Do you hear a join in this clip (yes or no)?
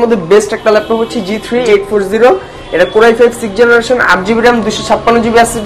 no